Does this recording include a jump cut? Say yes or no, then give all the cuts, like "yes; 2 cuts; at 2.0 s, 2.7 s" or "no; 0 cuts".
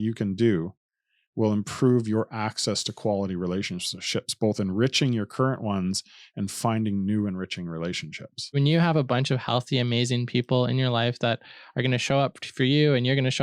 yes; 1 cut; at 8.4 s